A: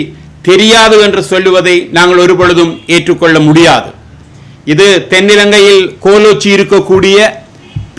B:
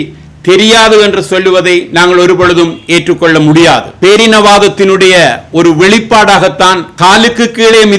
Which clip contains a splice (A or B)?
B